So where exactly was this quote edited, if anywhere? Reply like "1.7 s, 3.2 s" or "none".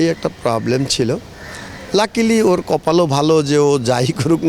none